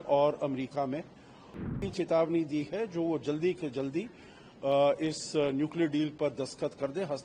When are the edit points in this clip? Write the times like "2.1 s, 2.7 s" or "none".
1.7 s